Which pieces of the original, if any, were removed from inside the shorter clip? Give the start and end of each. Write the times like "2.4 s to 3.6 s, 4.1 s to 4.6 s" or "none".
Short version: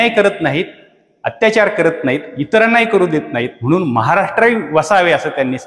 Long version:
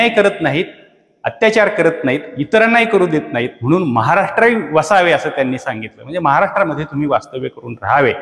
none